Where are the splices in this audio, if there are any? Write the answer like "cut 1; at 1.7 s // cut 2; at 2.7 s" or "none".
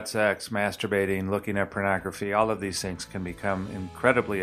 none